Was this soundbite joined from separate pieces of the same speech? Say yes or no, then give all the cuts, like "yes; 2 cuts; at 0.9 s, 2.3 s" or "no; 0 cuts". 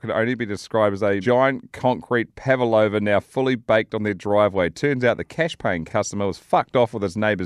yes; 1 cut; at 5.8 s